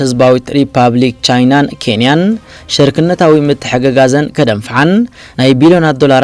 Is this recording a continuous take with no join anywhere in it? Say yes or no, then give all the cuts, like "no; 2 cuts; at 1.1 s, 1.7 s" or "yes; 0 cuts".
yes; 0 cuts